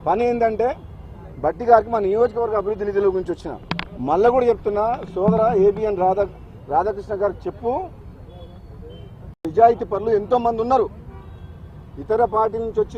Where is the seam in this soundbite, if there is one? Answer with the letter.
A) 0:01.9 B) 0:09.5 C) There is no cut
B